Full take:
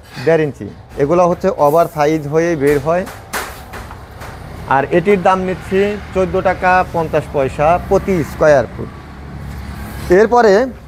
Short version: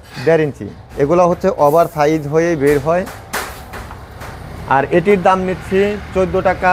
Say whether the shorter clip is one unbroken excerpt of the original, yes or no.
yes